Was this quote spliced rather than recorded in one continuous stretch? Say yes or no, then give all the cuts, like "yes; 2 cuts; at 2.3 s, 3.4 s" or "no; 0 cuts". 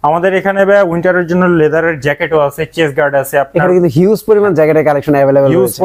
no; 0 cuts